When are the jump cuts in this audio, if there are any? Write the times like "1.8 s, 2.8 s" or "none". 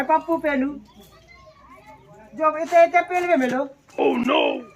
3.8 s